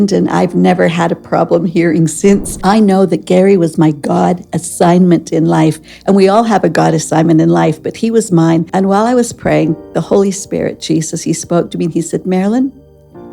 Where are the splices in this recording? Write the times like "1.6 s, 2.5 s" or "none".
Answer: 2.5 s, 8.7 s